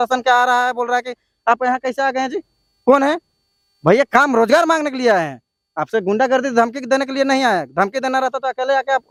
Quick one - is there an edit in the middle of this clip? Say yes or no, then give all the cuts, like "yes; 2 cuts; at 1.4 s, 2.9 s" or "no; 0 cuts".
no; 0 cuts